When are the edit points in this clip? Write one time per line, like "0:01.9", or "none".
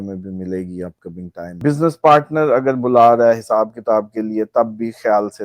0:01.6